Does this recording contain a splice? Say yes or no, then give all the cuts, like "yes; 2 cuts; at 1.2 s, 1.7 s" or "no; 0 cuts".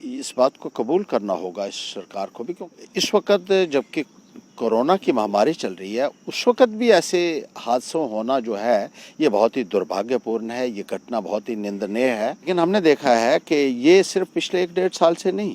yes; 2 cuts; at 2.6 s, 12.5 s